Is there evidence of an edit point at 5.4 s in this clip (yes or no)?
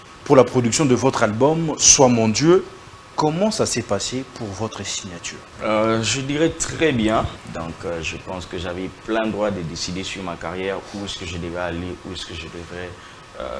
yes